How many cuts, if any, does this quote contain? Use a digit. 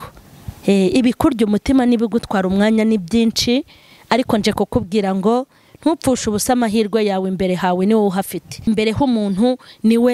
1